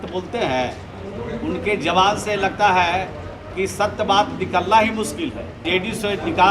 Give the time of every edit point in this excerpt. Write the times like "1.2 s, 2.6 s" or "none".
5.6 s